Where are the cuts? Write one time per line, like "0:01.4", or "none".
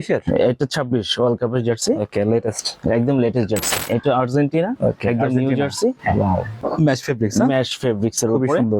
0:03.8
0:06.5